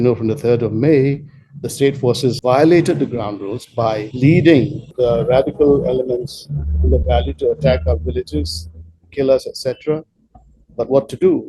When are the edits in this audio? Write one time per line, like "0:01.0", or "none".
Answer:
0:02.4
0:04.1
0:04.9